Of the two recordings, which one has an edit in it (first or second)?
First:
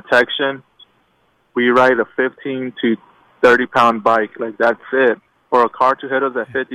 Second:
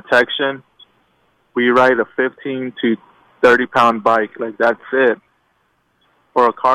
first